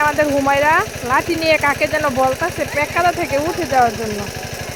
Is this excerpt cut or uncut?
uncut